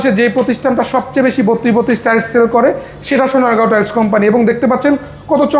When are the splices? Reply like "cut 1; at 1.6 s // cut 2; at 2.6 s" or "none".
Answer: none